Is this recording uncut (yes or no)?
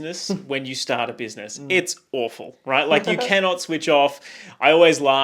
yes